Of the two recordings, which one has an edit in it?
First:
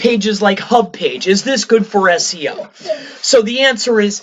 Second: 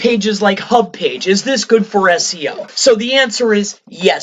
second; 1 cut; at 2.7 s

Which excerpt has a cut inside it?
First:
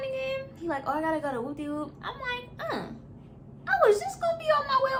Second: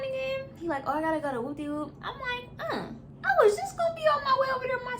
second; 1 cut; at 3.1 s

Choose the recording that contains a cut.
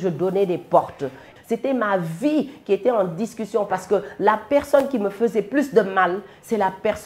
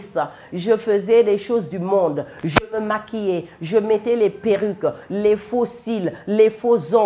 first; 1 cut; at 1.3 s

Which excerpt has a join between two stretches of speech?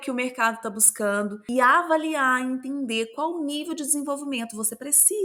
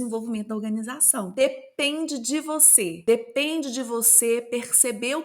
second; 1 cut; at 1.3 s

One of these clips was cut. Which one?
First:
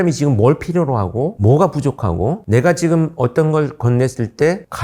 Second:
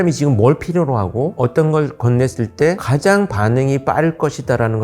second; 2 cuts; at 1.3 s, 2.9 s

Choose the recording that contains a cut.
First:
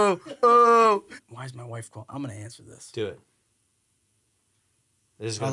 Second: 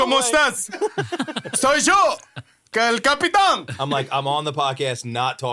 first; 1 cut; at 1.2 s

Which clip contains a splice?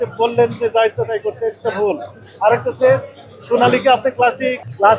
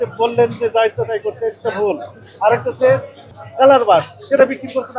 second; 1 cut; at 3.3 s

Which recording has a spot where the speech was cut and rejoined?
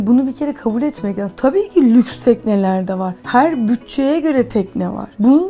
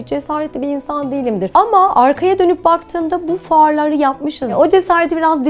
second; 2 cuts; at 1.5 s, 4.4 s

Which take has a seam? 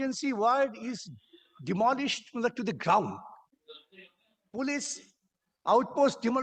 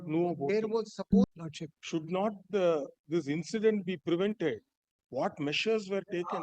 second; 1 cut; at 1.2 s

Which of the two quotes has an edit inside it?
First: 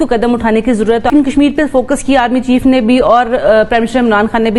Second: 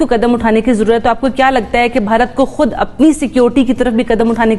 first; 1 cut; at 1.1 s

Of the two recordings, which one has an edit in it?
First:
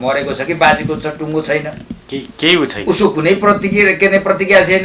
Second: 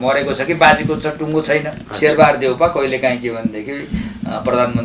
second; 1 cut; at 1.8 s

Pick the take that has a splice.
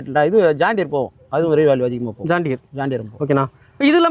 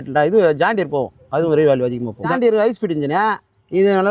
second; 1 cut; at 2.3 s

